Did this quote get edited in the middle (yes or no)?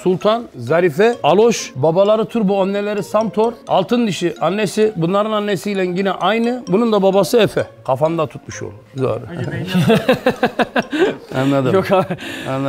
no